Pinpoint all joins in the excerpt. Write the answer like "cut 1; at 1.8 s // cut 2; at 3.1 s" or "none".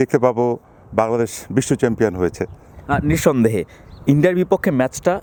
none